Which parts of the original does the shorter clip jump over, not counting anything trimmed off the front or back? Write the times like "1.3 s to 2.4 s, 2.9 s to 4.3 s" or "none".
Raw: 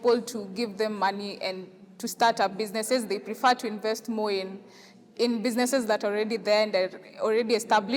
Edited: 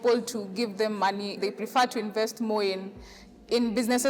1.4 s to 3.1 s